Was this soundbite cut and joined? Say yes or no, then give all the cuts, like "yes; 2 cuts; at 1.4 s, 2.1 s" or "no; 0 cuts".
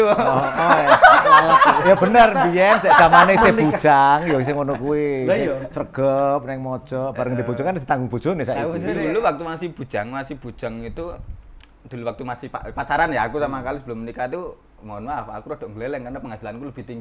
yes; 1 cut; at 9.0 s